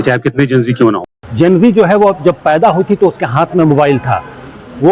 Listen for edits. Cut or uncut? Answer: cut